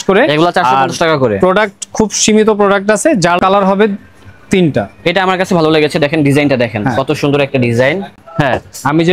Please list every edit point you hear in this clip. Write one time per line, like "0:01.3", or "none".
0:03.4
0:08.1